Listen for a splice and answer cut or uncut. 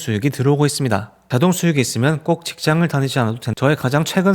cut